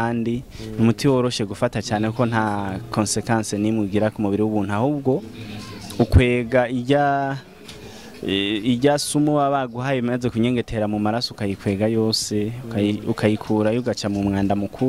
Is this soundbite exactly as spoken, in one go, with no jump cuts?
yes; 0 cuts

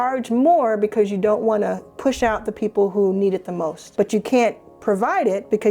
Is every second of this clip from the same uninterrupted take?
no; 2 cuts; at 1.9 s, 3.8 s

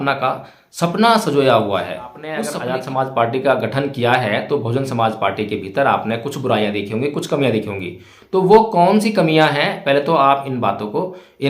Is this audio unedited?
no; 1 cut; at 2.2 s

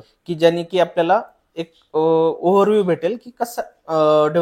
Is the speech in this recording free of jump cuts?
yes; 0 cuts

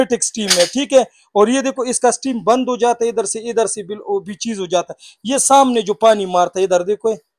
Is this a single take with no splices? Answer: yes; 0 cuts

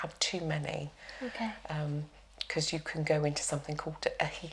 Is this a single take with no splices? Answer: yes; 0 cuts

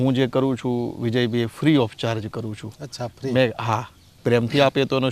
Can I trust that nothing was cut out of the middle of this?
no; 1 cut; at 4.2 s

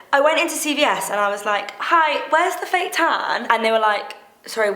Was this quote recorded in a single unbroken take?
no; 1 cut; at 3.4 s

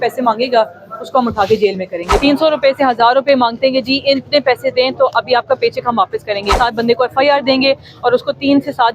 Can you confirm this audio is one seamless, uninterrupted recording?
no; 2 cuts; at 2.2 s, 6.5 s

